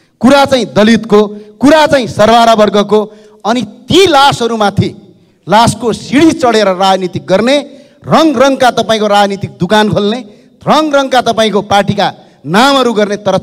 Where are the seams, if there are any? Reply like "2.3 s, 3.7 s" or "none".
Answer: none